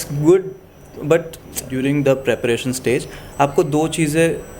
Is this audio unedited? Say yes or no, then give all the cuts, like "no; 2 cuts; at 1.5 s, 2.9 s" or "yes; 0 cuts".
no; 1 cut; at 1.6 s